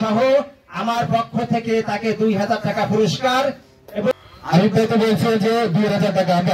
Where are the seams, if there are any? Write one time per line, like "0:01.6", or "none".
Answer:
0:04.1